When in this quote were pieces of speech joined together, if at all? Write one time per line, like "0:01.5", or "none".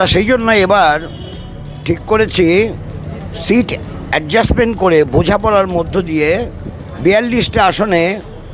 none